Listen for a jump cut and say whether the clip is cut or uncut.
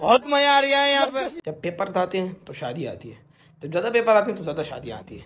cut